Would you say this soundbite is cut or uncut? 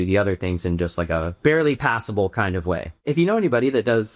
cut